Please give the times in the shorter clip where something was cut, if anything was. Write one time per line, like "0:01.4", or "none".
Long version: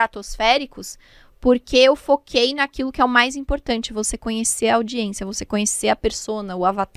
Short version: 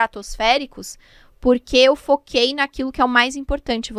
none